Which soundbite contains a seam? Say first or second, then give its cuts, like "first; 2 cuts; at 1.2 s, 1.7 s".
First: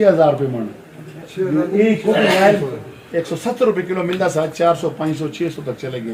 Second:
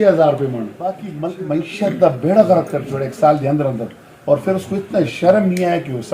second; 1 cut; at 1.1 s